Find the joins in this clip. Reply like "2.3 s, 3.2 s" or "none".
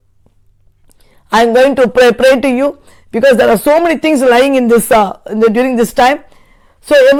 none